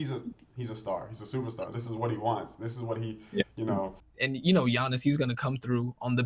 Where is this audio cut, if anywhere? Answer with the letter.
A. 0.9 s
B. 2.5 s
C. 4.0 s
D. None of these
C